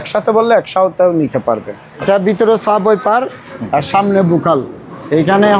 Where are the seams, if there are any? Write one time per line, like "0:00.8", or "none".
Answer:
0:02.0